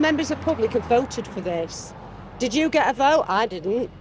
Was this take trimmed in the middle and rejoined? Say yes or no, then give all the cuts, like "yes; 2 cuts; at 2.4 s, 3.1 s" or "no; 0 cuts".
no; 0 cuts